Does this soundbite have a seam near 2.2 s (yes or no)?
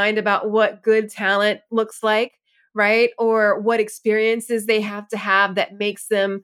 no